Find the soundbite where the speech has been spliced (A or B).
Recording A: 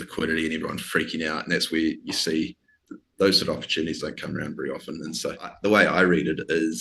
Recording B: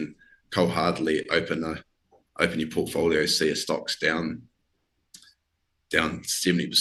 A